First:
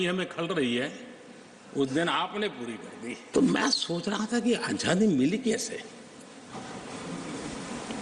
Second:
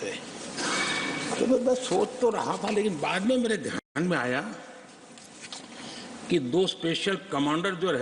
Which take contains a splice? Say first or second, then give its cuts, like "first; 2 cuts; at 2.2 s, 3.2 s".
first; 1 cut; at 3.2 s